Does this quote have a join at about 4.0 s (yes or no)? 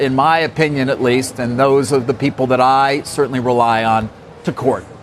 no